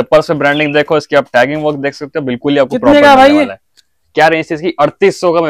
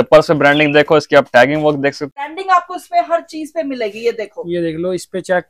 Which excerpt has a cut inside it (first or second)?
second